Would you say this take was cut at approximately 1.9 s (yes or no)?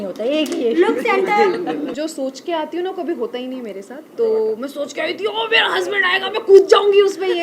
yes